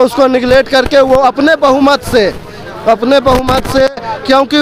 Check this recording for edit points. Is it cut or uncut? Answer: uncut